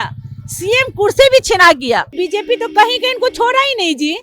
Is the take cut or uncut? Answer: cut